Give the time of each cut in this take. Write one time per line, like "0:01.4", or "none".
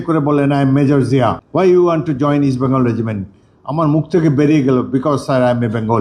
0:01.4